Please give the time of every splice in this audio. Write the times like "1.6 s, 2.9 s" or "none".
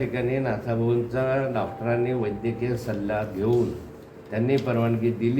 none